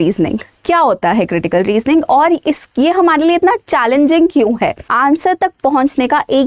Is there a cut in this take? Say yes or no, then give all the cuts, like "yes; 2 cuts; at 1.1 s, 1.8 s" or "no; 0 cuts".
yes; 1 cut; at 4.9 s